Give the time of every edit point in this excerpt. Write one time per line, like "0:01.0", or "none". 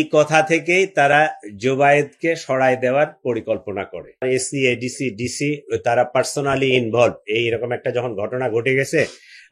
0:04.2